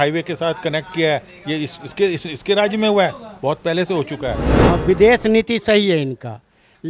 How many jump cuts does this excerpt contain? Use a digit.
1